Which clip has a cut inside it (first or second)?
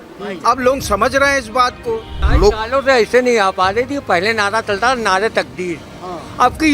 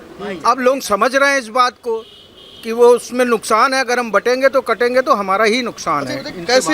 first